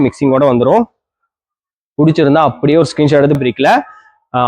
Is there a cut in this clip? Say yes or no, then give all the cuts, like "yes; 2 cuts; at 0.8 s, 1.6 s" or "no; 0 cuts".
yes; 1 cut; at 3.4 s